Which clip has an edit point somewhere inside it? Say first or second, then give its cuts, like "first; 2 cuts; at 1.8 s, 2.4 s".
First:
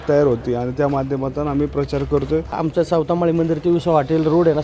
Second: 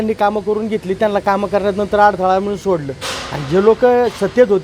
first; 1 cut; at 2.6 s